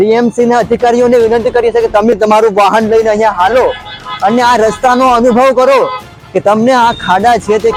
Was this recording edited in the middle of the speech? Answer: no; 0 cuts

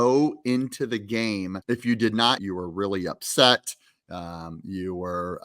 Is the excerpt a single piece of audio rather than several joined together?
no; 2 cuts; at 1.6 s, 2.4 s

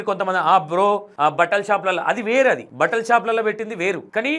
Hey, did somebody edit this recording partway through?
no; 0 cuts

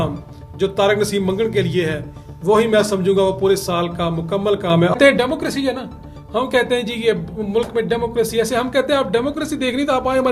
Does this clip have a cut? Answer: yes; 1 cut; at 5.0 s

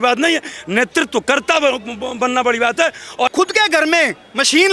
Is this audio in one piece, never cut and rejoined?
no; 1 cut; at 3.3 s

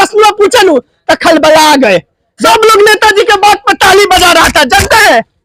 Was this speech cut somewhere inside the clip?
yes; 1 cut; at 2.4 s

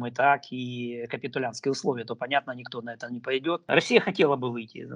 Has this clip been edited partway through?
yes; 1 cut; at 3.7 s

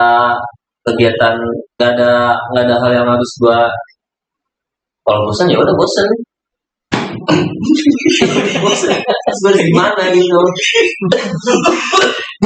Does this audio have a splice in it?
no; 0 cuts

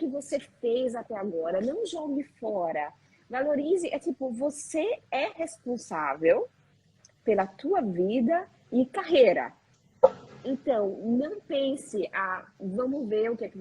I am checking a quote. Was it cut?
no; 0 cuts

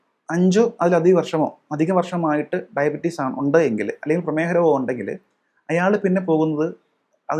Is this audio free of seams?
yes; 0 cuts

